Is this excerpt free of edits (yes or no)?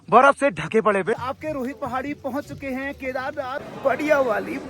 no